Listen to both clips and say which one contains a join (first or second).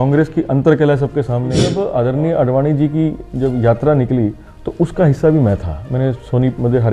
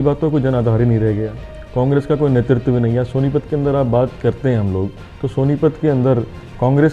first